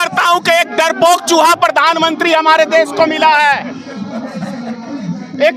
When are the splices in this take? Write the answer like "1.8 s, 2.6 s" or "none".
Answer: none